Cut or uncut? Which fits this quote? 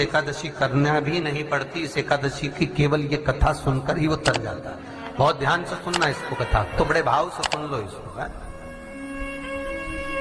uncut